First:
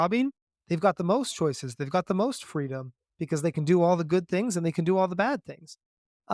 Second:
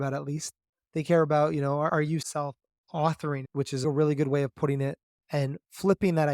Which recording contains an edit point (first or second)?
second